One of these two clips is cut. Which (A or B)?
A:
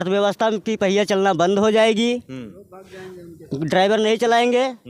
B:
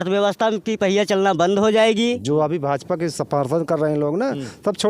B